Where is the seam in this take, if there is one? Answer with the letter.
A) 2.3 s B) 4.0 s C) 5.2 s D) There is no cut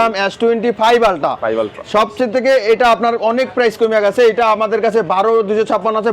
D